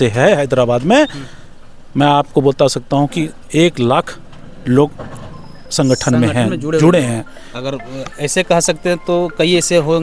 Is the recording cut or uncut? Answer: uncut